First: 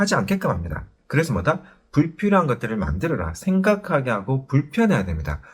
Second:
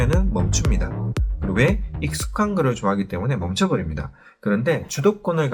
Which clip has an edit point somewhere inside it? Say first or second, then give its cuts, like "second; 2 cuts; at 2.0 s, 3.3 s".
first; 1 cut; at 1.0 s